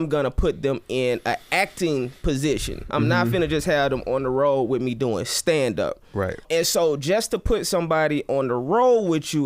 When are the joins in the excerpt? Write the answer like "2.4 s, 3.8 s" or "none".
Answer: 6.4 s